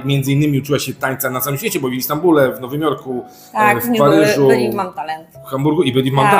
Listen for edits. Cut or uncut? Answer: uncut